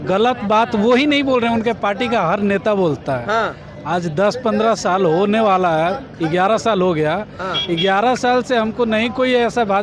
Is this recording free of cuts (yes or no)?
yes